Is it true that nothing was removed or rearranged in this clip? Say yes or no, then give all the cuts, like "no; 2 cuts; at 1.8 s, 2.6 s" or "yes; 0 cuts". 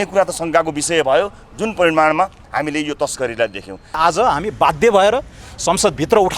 no; 1 cut; at 4.0 s